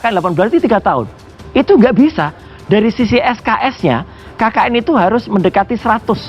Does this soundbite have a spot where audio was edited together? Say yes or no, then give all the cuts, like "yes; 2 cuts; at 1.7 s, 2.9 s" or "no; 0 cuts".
no; 0 cuts